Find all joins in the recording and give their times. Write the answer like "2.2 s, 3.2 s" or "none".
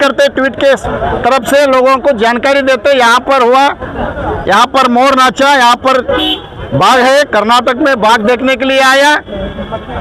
none